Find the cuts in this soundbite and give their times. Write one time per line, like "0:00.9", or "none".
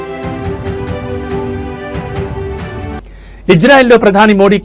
0:03.0

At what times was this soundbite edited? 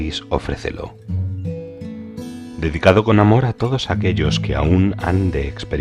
0:01.0
0:02.6

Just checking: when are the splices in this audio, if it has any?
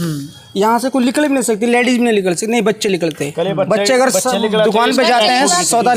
none

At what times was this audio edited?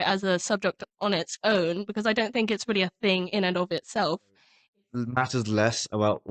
0:04.6

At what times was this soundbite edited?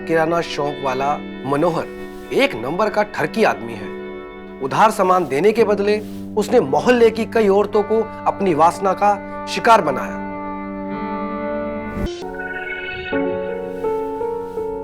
0:12.1

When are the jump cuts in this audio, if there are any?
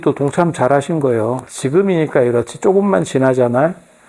0:01.5

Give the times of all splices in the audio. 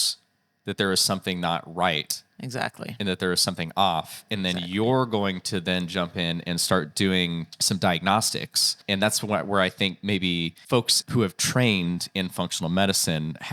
0:07.5
0:08.7
0:11.0

